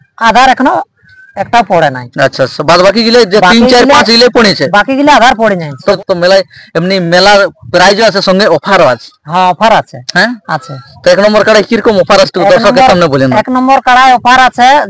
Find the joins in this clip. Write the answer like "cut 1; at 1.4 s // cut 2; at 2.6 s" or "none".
cut 1; at 6.0 s